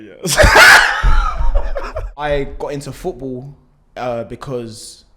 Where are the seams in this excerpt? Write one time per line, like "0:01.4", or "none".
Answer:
0:02.2